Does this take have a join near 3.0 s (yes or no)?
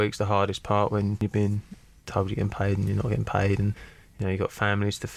no